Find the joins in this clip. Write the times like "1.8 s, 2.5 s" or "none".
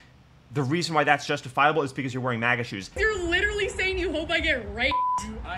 3.0 s